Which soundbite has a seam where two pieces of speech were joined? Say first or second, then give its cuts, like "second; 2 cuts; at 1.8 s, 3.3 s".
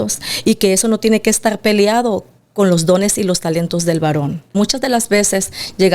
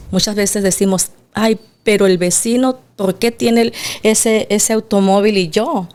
first; 1 cut; at 4.6 s